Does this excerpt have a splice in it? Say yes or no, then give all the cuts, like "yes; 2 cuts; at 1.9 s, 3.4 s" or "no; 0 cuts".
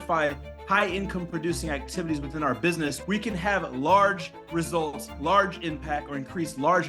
yes; 1 cut; at 3.0 s